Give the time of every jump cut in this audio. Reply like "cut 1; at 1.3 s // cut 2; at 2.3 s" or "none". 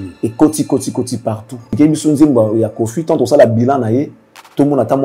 cut 1; at 1.8 s